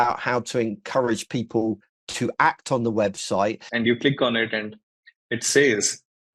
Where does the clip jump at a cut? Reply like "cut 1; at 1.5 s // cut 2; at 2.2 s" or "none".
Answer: cut 1; at 3.7 s